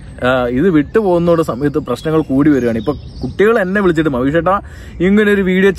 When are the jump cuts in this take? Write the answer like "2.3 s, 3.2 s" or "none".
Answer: none